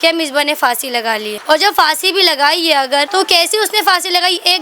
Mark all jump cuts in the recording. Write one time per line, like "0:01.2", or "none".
0:01.3
0:03.1